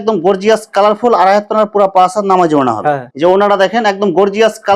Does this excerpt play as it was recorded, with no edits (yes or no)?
no